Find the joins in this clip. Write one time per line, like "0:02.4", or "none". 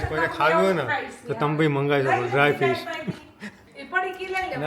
0:03.7